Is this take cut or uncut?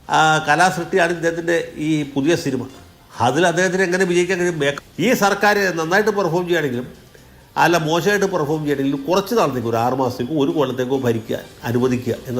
cut